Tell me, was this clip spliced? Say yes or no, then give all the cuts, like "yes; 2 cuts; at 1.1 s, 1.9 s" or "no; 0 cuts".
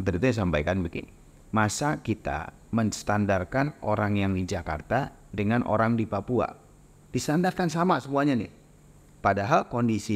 no; 0 cuts